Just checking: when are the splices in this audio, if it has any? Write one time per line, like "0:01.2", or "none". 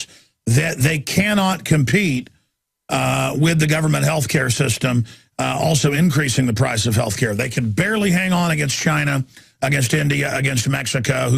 0:10.1